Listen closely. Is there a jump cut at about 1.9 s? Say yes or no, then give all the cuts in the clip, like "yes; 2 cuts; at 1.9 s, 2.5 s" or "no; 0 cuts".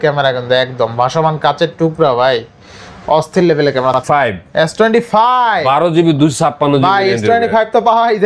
no; 1 cut; at 4.0 s